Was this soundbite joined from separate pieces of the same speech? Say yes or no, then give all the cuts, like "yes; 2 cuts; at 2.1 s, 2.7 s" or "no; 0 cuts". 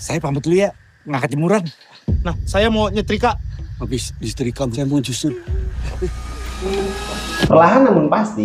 no; 0 cuts